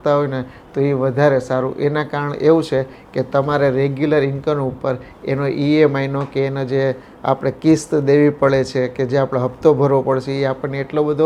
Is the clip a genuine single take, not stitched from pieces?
yes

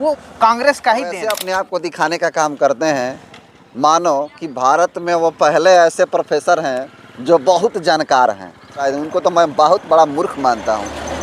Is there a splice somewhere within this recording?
yes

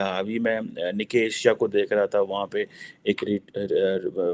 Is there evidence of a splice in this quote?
no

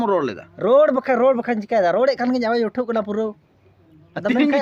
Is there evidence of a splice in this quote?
no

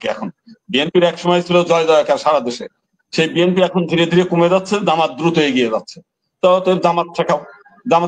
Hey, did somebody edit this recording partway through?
no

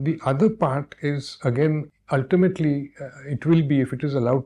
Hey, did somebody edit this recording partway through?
yes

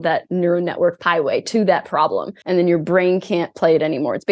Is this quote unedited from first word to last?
no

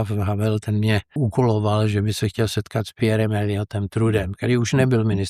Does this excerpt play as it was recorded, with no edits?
no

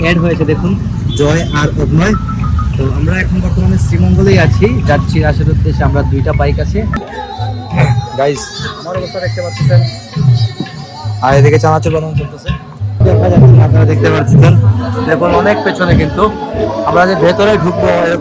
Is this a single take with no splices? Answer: no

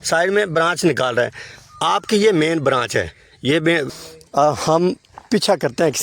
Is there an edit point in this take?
yes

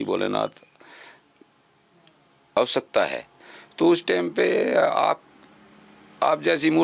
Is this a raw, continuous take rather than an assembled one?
yes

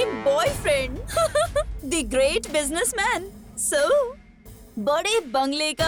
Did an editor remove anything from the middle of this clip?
no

